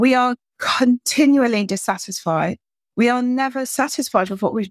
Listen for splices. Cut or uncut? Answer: cut